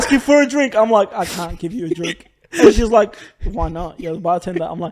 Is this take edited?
no; 0 cuts

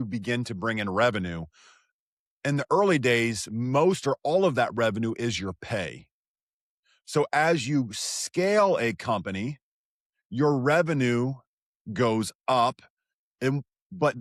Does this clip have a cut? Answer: no; 0 cuts

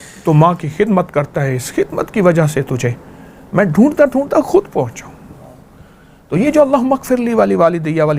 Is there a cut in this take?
no; 0 cuts

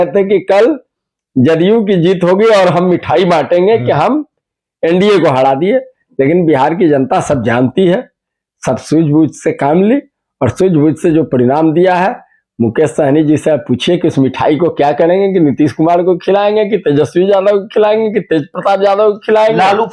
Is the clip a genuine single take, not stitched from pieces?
yes; 0 cuts

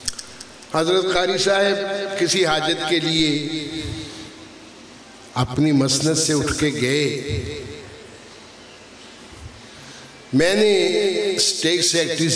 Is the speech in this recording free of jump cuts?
yes; 0 cuts

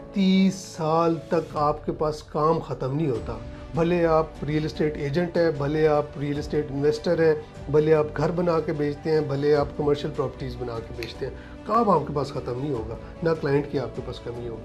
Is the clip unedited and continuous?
yes; 0 cuts

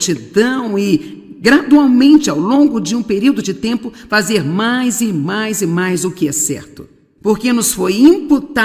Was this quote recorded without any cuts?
no; 1 cut; at 4.5 s

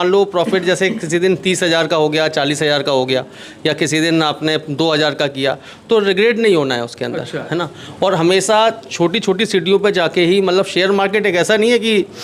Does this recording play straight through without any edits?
yes; 0 cuts

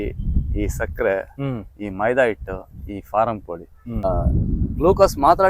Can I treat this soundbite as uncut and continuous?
no; 1 cut; at 4.1 s

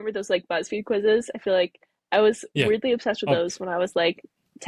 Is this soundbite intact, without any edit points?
yes; 0 cuts

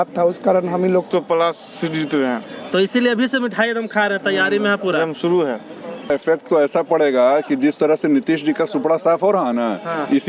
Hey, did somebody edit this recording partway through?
yes; 2 cuts; at 1.1 s, 6.1 s

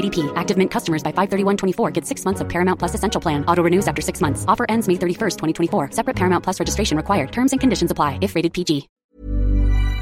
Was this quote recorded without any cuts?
no; 1 cut; at 9.0 s

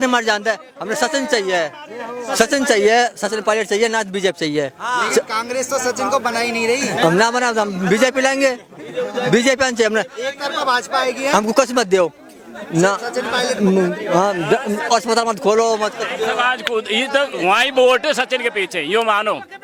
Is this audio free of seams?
yes; 0 cuts

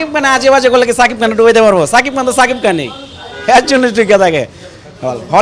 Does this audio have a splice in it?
no; 0 cuts

